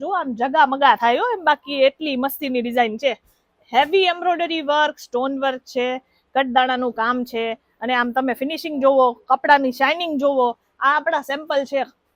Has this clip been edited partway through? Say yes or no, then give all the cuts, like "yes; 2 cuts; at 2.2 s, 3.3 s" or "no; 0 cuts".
no; 0 cuts